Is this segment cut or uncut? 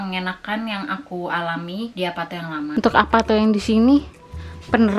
cut